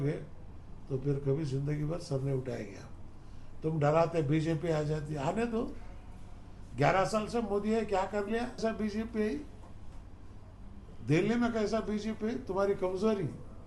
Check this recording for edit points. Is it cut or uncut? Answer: cut